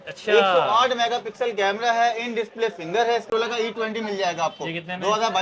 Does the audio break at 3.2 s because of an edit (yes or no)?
yes